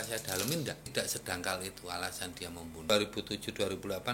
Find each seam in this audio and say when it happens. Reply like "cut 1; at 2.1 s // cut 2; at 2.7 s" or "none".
cut 1; at 0.9 s // cut 2; at 2.9 s